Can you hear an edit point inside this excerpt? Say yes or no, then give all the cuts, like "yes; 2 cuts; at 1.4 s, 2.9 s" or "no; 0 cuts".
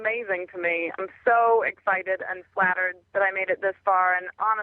yes; 2 cuts; at 0.9 s, 2.9 s